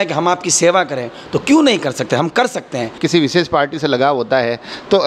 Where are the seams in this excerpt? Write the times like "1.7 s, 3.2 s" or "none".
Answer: 3.0 s